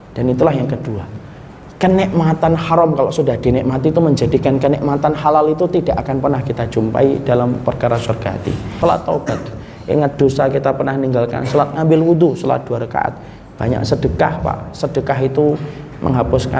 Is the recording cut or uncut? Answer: cut